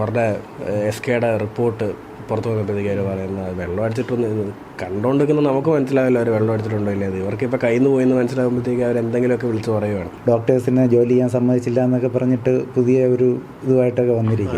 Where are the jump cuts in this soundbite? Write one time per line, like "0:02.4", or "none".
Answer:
0:10.1